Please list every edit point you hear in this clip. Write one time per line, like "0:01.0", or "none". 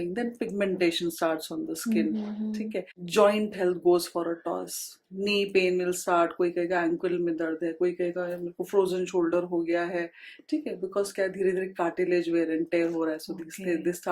0:03.0